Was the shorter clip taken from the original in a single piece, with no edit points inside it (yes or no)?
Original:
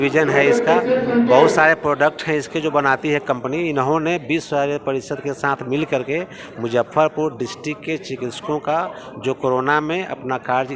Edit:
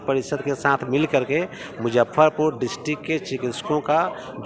yes